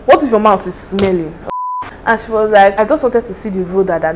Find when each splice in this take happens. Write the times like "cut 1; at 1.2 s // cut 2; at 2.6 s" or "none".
cut 1; at 1.4 s // cut 2; at 2.7 s